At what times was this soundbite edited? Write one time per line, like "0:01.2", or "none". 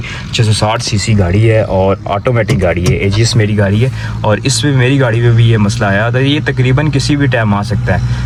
none